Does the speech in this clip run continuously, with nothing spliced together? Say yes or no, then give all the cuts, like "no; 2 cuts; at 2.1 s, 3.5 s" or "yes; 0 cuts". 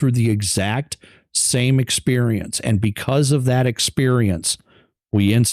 yes; 0 cuts